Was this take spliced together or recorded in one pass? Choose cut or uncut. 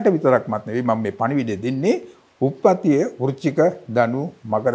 uncut